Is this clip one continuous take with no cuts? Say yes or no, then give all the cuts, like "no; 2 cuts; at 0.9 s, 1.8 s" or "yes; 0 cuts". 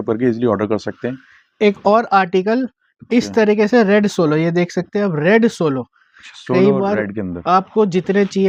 yes; 0 cuts